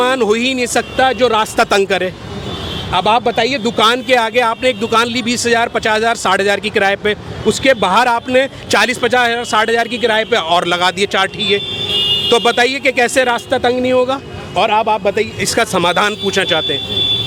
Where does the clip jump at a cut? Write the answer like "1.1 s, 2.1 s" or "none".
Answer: none